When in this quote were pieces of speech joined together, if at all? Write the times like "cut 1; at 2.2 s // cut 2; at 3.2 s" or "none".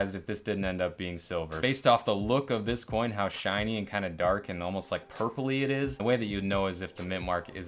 cut 1; at 1.5 s // cut 2; at 6.0 s